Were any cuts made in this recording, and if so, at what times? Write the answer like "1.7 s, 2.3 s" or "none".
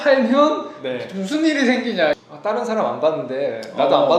2.2 s